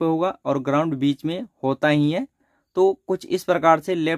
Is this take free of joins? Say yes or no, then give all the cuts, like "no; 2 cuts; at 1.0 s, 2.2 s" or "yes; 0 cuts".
yes; 0 cuts